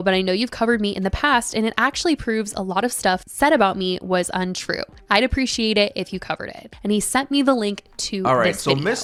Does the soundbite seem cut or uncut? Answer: uncut